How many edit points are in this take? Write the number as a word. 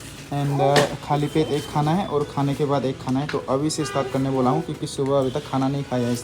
zero